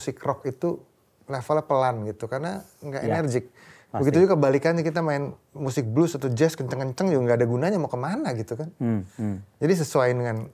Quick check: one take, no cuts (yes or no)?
yes